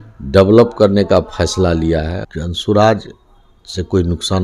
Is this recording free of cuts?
no; 1 cut; at 2.2 s

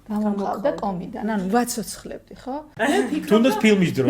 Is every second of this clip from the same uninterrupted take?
no; 1 cut; at 2.7 s

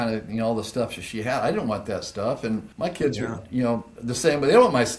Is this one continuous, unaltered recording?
no; 2 cuts; at 2.7 s, 3.9 s

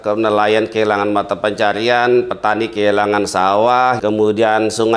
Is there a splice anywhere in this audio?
yes; 1 cut; at 4.0 s

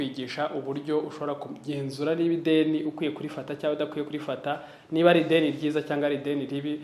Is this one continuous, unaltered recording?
yes; 0 cuts

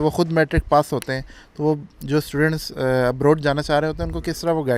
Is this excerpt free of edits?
yes; 0 cuts

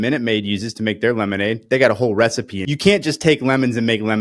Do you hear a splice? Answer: yes; 1 cut; at 2.6 s

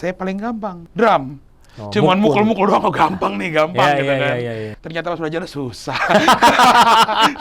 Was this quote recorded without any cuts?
no; 2 cuts; at 0.8 s, 4.7 s

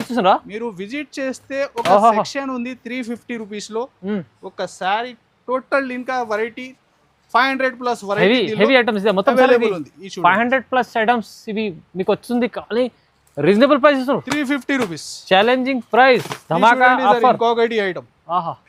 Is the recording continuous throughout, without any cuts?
yes; 0 cuts

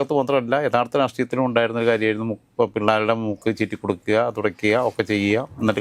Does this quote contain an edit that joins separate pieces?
no; 0 cuts

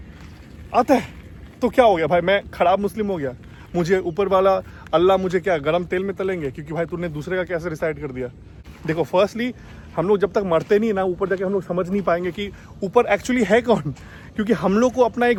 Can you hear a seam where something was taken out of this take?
no; 0 cuts

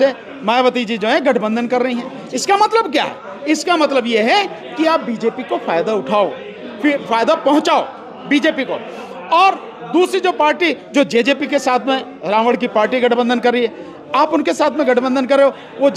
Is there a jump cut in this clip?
no; 0 cuts

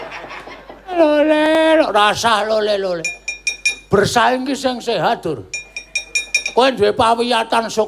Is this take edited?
yes; 1 cut; at 0.9 s

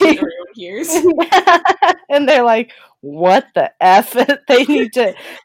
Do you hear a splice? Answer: no; 0 cuts

